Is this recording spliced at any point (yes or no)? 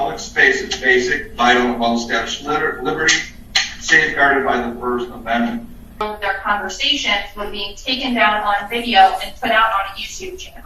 yes